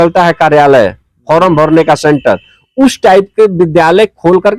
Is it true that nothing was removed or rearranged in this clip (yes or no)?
yes